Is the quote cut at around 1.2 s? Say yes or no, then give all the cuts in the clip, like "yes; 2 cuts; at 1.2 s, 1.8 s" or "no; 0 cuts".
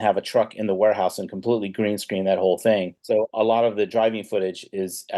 no; 1 cut; at 3.0 s